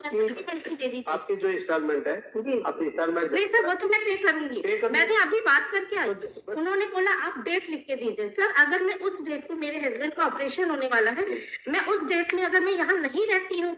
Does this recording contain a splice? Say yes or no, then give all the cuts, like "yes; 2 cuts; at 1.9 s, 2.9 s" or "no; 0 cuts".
no; 0 cuts